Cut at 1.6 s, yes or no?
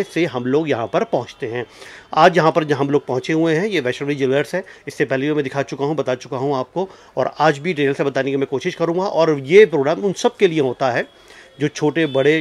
no